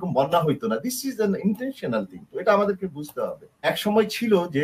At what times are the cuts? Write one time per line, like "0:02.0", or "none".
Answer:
0:03.7